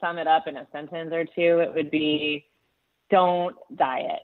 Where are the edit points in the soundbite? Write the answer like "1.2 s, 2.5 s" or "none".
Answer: none